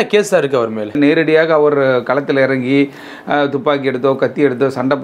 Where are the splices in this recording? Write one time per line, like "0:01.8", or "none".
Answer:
0:00.9